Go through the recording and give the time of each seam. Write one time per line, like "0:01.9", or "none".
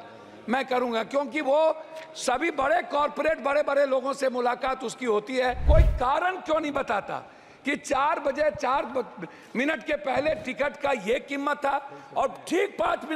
0:05.6